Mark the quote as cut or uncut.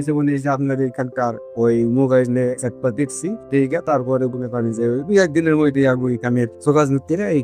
uncut